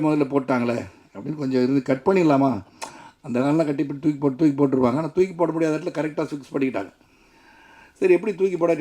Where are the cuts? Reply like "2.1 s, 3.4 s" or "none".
none